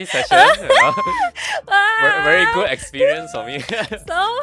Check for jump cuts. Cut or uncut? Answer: uncut